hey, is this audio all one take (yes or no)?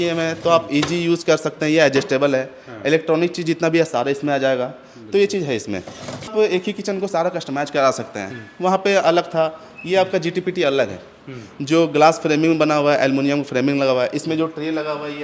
yes